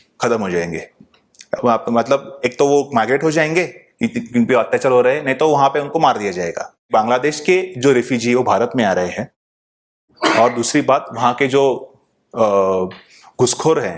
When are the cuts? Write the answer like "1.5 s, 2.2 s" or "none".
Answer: 6.9 s